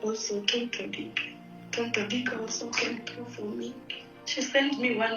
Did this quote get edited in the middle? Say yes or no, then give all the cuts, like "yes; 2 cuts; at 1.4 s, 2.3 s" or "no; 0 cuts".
yes; 1 cut; at 3.9 s